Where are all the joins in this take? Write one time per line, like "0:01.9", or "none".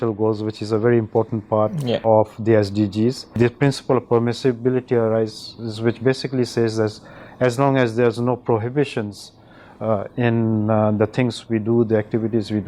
0:02.0
0:03.3